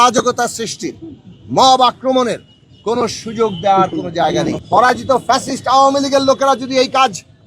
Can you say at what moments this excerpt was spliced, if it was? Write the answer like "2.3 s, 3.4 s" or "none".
4.6 s